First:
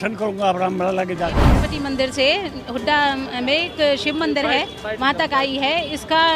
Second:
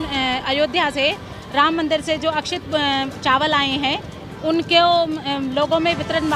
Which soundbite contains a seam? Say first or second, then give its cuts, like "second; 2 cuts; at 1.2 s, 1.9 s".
first; 1 cut; at 1.5 s